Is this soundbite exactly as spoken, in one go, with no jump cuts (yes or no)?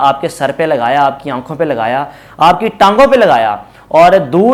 yes